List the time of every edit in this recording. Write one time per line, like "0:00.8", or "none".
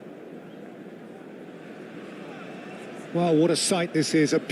0:03.1